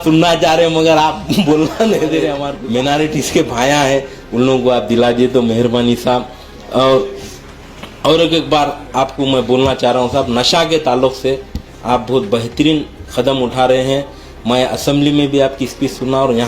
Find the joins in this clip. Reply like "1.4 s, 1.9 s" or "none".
2.5 s